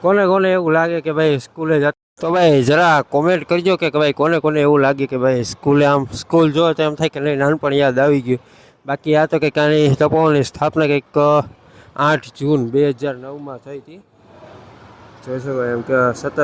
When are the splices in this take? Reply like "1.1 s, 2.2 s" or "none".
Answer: none